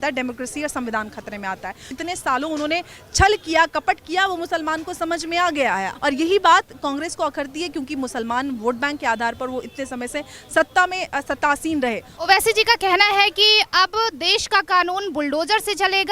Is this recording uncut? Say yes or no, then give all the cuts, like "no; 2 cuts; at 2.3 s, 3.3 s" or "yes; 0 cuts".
no; 3 cuts; at 1.9 s, 5.9 s, 12.1 s